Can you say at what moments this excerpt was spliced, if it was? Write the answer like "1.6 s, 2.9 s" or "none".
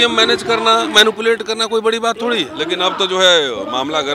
2.5 s